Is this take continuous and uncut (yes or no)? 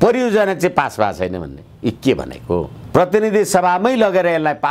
no